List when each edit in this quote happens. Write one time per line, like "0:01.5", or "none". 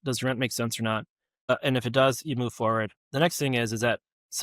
0:01.5
0:03.0